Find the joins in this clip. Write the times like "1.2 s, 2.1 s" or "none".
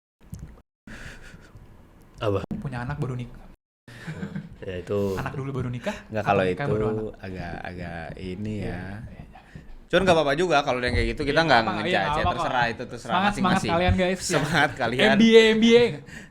none